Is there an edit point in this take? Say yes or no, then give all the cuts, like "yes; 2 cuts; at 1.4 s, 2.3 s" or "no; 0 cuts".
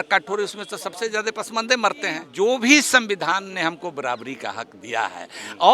yes; 1 cut; at 2.3 s